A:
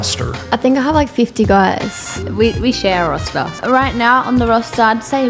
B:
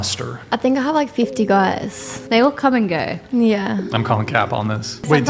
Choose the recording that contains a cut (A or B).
A